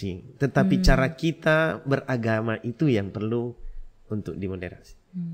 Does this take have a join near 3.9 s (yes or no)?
no